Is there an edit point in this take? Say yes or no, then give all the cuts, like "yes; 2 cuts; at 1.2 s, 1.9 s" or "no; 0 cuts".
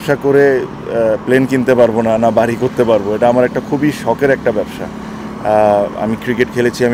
no; 0 cuts